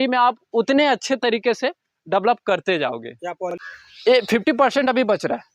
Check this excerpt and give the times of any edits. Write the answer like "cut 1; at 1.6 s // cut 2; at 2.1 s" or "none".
cut 1; at 3.4 s